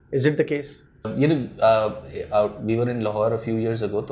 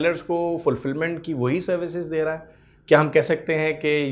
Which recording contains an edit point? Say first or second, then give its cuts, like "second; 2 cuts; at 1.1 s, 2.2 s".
first; 1 cut; at 1.1 s